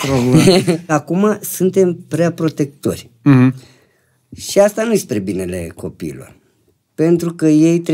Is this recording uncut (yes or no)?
no